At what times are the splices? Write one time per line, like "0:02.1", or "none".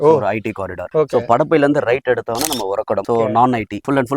0:03.0